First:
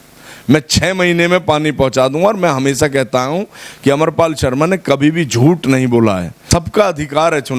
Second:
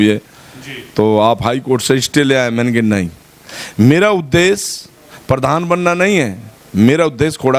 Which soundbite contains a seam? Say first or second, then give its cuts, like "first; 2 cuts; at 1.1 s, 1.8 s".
first; 1 cut; at 6.3 s